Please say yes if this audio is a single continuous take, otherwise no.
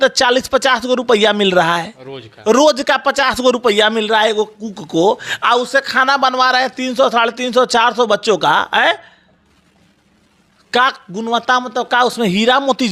yes